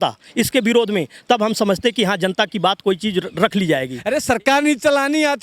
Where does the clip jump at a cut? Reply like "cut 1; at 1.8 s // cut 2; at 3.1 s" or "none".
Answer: cut 1; at 3.9 s

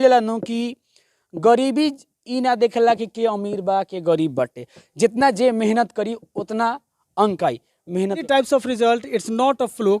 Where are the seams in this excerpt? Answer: cut 1; at 8.2 s

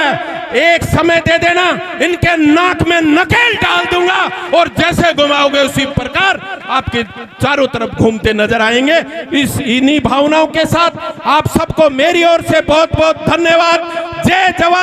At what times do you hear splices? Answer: none

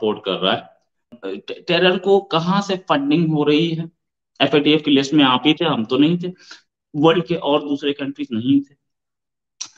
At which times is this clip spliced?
cut 1; at 1.1 s

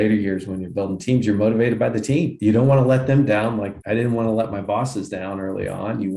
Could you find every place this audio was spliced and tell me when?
cut 1; at 2.3 s // cut 2; at 3.8 s

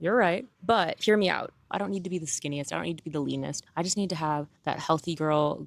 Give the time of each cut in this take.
cut 1; at 1.6 s

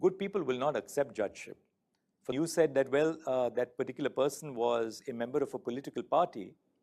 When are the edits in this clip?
cut 1; at 2.3 s

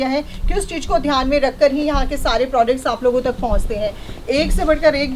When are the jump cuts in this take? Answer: none

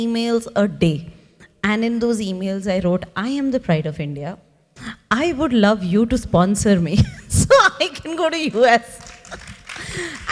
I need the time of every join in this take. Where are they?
none

